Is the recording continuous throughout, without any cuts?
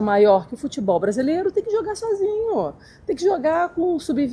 yes; 0 cuts

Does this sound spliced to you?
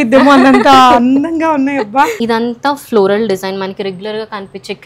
yes; 1 cut; at 2.2 s

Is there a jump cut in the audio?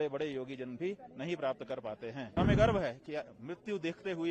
yes; 1 cut; at 2.4 s

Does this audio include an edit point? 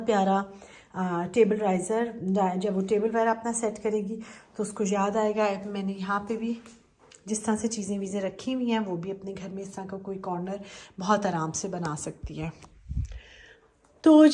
no; 0 cuts

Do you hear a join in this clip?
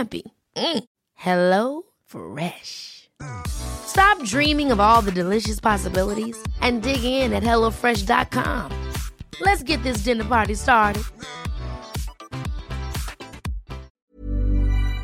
yes; 1 cut; at 13.9 s

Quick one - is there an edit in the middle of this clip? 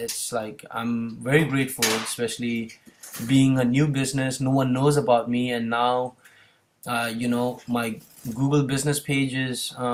no; 0 cuts

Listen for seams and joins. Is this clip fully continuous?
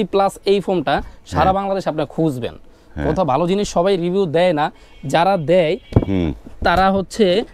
yes; 0 cuts

